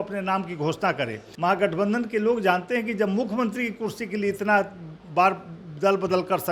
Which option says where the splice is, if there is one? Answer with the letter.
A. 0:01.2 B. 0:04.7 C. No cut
A